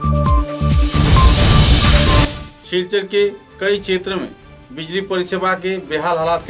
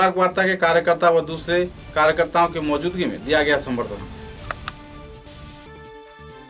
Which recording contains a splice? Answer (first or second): first